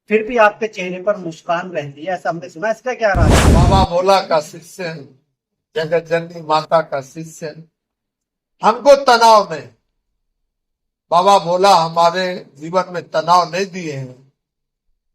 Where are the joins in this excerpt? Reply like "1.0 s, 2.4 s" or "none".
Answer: 3.4 s